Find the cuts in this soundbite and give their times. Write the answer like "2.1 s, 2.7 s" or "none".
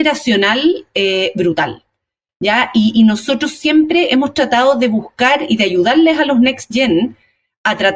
none